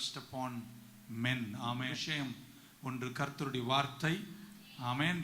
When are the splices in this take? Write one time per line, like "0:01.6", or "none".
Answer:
0:02.0